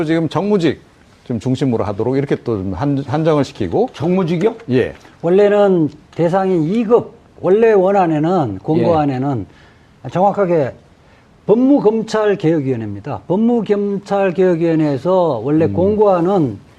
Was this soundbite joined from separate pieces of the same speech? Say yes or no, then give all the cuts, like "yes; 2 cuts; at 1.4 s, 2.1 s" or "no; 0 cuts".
yes; 1 cut; at 14.8 s